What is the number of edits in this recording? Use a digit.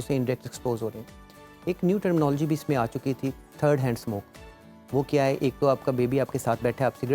0